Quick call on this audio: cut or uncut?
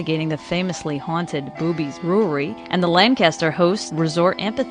cut